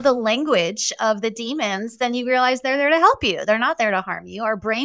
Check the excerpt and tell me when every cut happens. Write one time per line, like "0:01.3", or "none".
none